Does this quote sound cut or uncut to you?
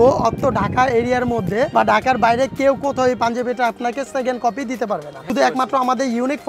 cut